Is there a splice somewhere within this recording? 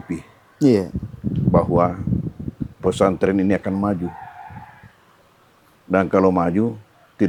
no; 0 cuts

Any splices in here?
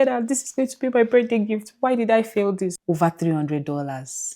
yes; 1 cut; at 2.8 s

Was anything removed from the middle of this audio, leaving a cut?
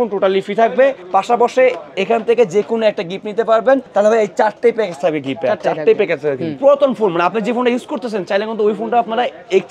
yes; 3 cuts; at 1.0 s, 3.9 s, 6.6 s

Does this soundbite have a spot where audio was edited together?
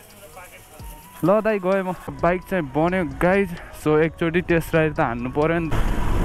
no; 0 cuts

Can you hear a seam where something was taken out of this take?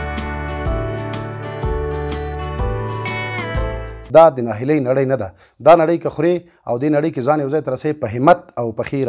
yes; 1 cut; at 3.9 s

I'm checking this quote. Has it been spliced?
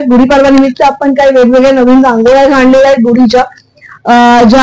no; 0 cuts

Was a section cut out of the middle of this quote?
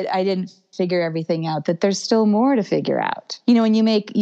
yes; 1 cut; at 3.3 s

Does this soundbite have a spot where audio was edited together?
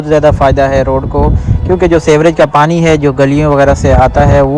no; 0 cuts

